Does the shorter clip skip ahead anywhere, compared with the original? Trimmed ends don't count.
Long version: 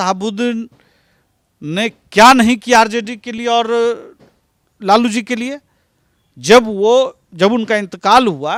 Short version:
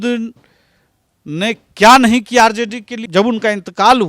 yes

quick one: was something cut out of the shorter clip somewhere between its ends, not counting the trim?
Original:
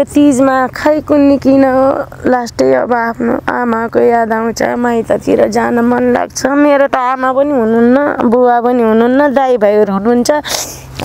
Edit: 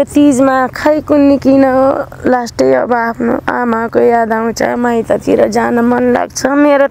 no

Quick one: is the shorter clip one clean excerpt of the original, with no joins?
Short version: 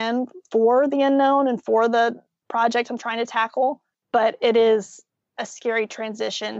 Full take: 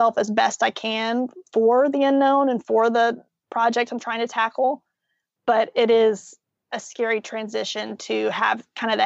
no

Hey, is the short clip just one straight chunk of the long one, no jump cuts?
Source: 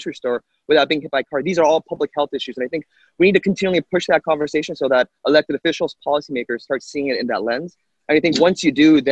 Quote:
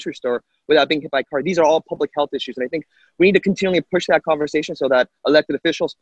yes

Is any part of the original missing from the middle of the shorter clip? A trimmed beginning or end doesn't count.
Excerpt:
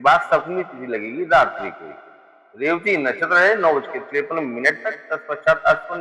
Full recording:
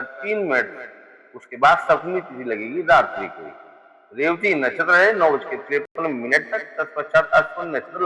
yes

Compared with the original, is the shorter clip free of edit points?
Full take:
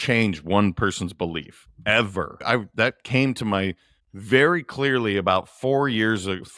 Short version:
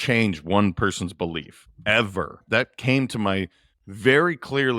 no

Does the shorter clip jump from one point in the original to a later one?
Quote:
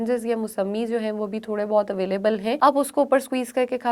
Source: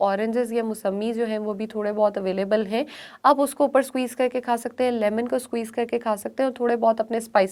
yes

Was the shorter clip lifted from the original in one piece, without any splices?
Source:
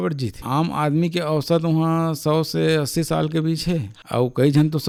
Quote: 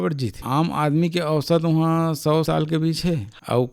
no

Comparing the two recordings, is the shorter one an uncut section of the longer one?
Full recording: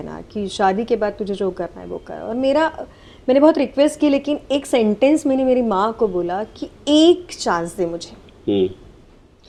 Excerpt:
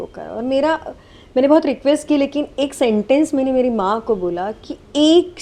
yes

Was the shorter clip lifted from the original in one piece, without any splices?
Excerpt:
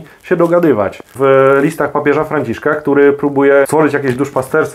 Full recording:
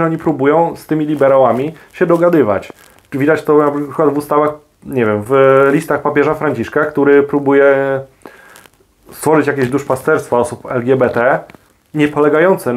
no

